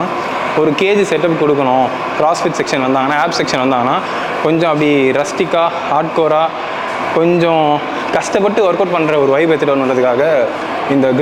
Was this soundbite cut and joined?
no; 0 cuts

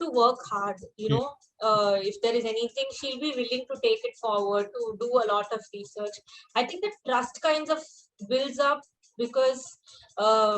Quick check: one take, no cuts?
yes; 0 cuts

